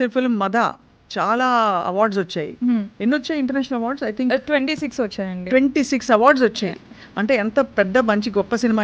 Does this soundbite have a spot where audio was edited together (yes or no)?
no